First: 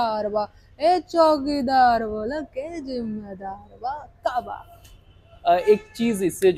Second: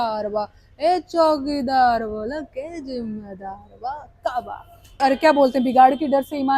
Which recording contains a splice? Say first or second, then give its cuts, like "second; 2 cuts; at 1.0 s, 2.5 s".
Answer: second; 1 cut; at 5.0 s